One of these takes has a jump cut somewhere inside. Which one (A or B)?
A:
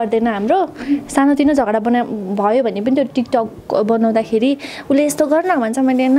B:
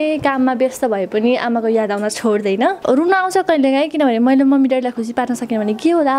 B